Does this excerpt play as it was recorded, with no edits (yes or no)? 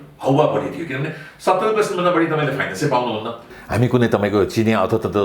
no